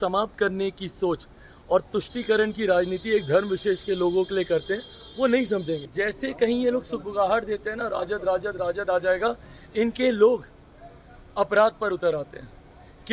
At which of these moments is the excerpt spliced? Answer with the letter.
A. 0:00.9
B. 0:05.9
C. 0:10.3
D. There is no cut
B